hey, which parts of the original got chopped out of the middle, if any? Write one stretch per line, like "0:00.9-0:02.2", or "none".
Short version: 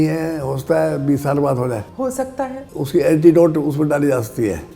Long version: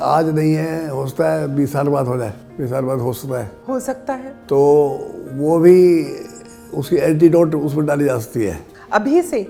0:02.6-0:06.1